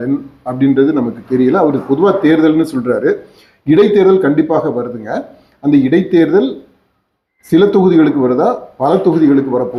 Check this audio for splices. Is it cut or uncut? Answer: uncut